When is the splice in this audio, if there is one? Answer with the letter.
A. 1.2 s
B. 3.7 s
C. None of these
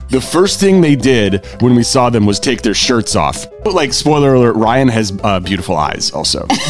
B